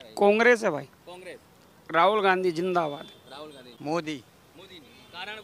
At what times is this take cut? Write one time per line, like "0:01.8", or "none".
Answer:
0:03.6